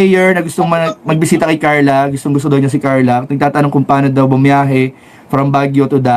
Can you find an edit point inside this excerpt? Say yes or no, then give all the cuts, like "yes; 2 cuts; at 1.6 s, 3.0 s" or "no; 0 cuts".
no; 0 cuts